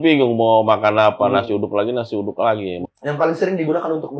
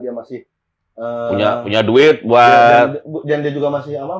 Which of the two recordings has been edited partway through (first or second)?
first